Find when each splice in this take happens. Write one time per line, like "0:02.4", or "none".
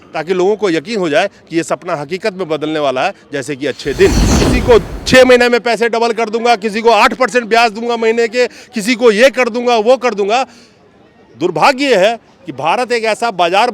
0:04.3